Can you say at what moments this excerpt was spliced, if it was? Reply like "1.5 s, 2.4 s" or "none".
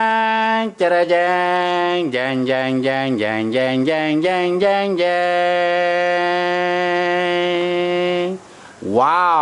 none